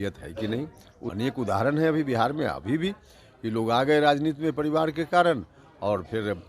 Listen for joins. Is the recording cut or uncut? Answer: cut